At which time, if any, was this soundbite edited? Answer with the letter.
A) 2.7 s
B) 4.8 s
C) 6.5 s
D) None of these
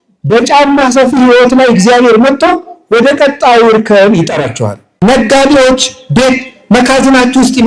B